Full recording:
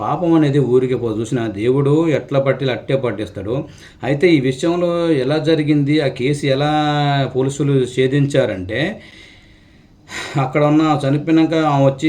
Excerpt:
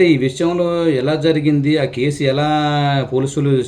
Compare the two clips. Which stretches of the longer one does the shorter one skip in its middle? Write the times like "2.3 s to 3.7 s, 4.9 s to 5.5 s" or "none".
none